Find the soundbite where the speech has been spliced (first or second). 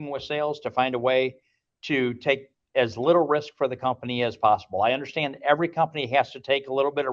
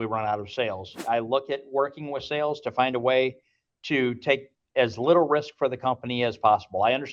second